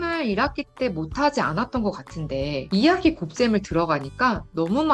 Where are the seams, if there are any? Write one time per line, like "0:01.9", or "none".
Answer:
0:02.6